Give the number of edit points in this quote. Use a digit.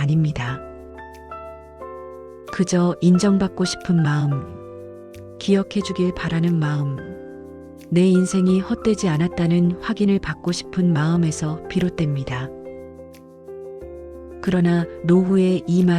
2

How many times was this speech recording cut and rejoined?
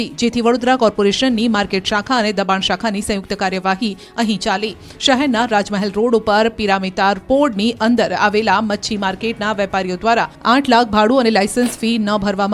1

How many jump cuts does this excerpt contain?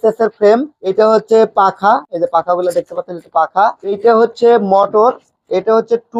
0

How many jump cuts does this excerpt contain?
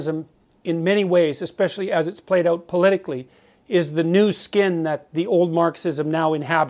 0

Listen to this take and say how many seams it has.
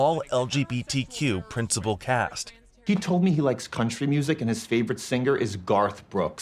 1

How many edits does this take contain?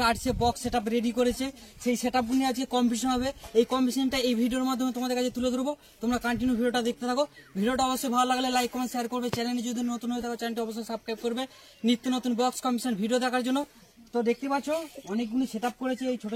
0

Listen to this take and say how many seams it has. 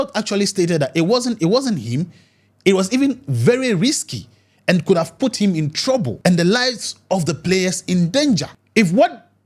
2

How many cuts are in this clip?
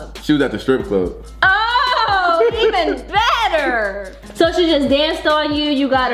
0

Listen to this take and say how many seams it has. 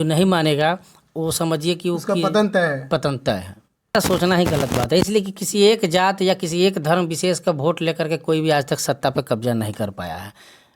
1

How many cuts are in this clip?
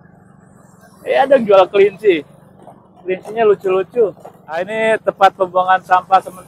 1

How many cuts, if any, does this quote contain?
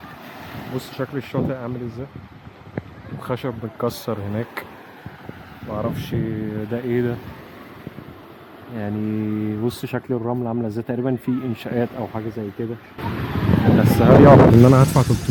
0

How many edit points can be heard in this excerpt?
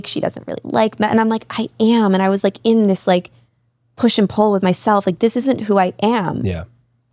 0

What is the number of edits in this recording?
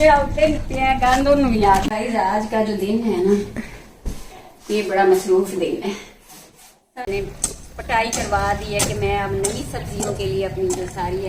2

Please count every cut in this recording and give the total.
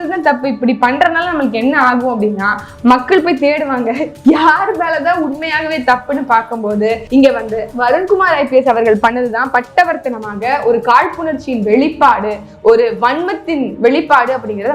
1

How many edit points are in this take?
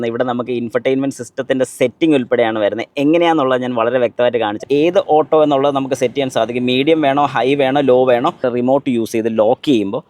2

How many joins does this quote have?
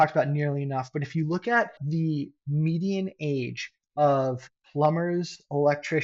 1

